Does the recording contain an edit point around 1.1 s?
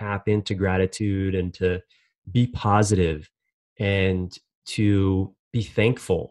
no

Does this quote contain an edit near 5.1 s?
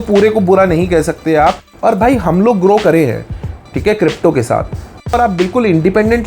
yes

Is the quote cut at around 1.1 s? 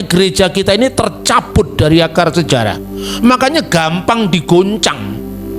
no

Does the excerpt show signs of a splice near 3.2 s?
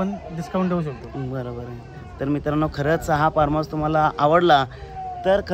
no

